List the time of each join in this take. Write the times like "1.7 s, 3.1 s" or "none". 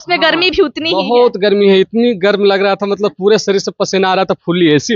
none